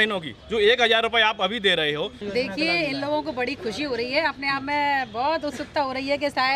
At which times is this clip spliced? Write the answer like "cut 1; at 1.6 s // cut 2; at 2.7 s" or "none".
cut 1; at 2.2 s